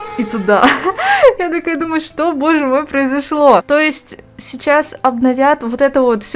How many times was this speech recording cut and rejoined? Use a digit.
1